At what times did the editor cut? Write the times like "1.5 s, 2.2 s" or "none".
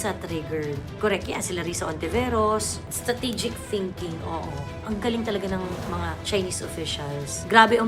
2.9 s, 4.8 s, 6.2 s